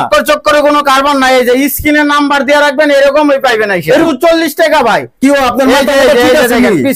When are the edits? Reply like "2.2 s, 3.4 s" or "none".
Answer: 4.1 s

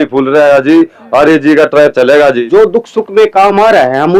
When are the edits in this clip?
2.4 s

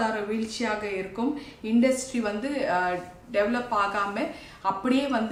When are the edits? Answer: none

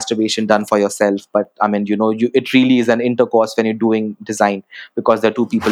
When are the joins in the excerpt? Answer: none

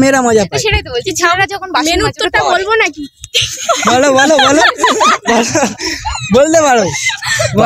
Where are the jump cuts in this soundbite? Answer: 6.6 s

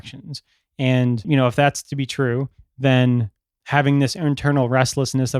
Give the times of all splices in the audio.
1.3 s

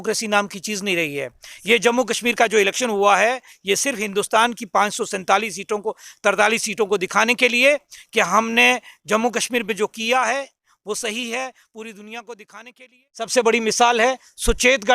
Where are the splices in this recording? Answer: 13.3 s

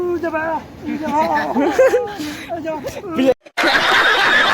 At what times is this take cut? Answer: 3.3 s

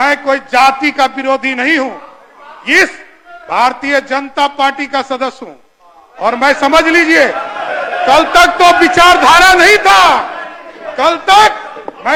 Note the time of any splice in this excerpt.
none

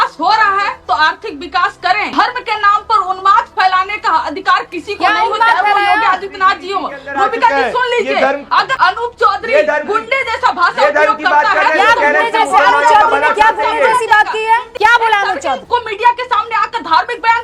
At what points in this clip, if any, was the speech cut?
2.1 s, 8.7 s, 14.7 s, 15.6 s

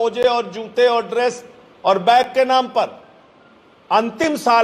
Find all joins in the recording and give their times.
none

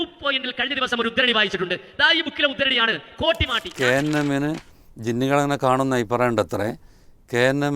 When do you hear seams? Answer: 3.6 s

